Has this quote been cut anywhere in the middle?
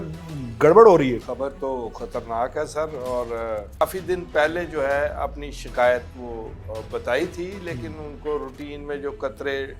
yes; 2 cuts; at 1.2 s, 3.8 s

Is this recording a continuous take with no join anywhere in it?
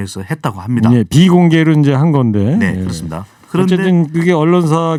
yes; 0 cuts

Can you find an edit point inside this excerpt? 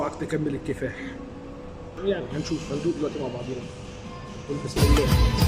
yes; 1 cut; at 2.0 s

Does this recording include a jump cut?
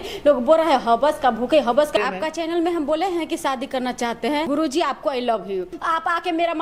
yes; 3 cuts; at 2.0 s, 4.5 s, 5.8 s

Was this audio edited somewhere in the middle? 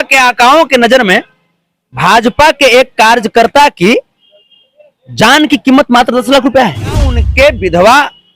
yes; 1 cut; at 7.2 s

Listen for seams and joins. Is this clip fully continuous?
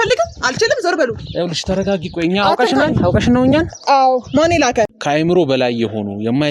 no; 1 cut; at 5.0 s

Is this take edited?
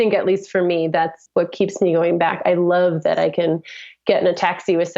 yes; 1 cut; at 1.2 s

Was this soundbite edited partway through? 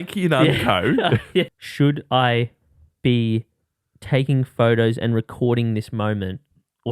yes; 1 cut; at 1.5 s

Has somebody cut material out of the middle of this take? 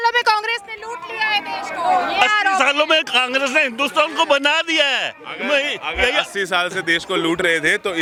no; 0 cuts

